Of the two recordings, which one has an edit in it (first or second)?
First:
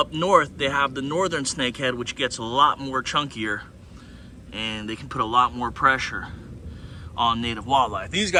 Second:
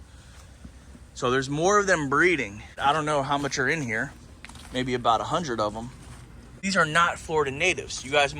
second